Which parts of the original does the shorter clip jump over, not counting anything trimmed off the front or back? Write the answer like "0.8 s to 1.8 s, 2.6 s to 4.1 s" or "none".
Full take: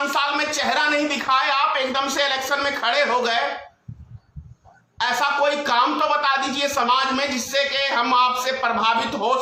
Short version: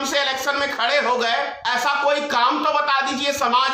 3.6 s to 4.9 s